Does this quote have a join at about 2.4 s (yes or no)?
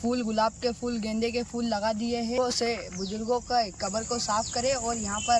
yes